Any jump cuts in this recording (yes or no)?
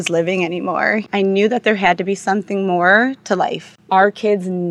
yes